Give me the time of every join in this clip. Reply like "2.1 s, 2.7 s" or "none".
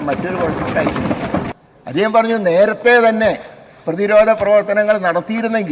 1.5 s